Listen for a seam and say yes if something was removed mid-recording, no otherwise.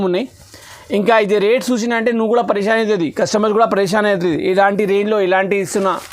no